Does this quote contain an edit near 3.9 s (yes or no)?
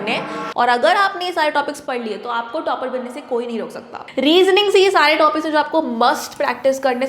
yes